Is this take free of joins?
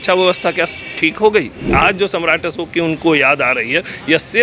no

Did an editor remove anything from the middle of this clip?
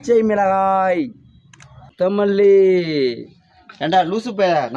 no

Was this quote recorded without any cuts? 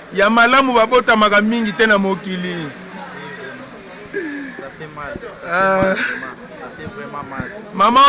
yes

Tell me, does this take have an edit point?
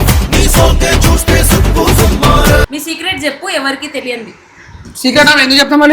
yes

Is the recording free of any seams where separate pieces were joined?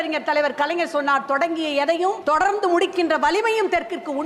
no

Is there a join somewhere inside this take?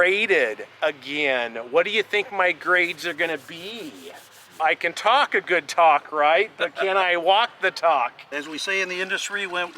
yes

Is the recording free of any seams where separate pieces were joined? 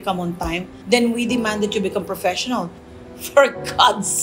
no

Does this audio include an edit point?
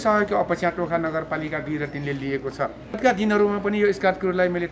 yes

